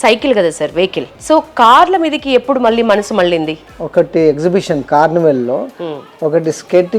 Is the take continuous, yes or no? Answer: no